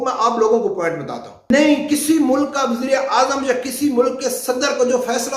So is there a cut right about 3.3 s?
no; 1 cut; at 1.5 s

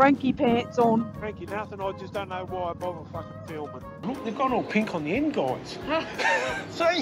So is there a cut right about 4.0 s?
yes; 2 cuts; at 1.1 s, 4.0 s

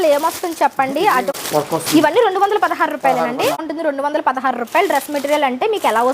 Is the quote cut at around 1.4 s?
yes; 2 cuts; at 1.4 s, 3.7 s

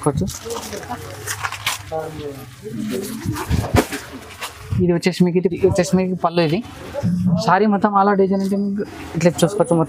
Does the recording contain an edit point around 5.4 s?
yes; 1 cut; at 5.4 s

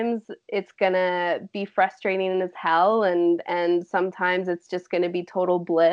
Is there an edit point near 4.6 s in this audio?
no; 0 cuts

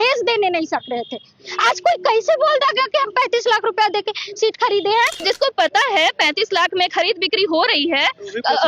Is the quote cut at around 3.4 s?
no; 1 cut; at 5.2 s

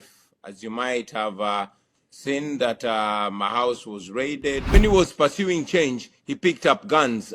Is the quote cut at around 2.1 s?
no; 1 cut; at 4.7 s

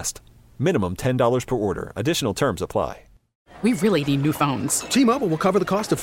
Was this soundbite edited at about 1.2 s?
no; 1 cut; at 3.5 s

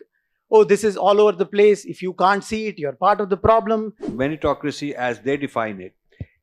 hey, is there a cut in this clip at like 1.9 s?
no; 1 cut; at 4.0 s

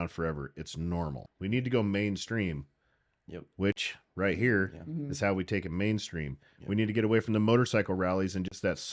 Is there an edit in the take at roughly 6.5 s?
no; 1 cut; at 1.3 s

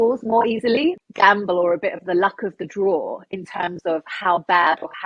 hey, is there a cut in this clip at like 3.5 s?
no; 1 cut; at 1.1 s

